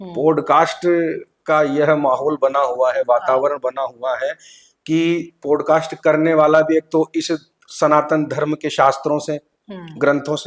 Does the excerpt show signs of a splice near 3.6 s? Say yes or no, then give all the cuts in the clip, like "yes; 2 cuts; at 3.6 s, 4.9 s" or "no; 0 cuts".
no; 0 cuts